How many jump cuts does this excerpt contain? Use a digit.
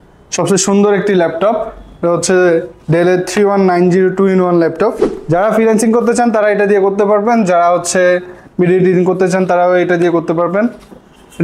1